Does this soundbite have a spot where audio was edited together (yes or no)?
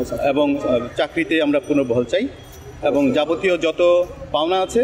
no